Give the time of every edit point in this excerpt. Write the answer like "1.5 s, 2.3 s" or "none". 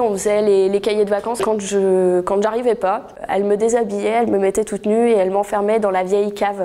1.4 s